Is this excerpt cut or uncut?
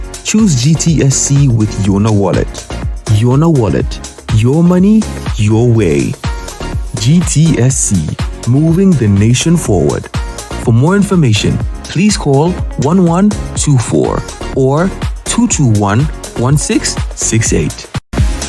uncut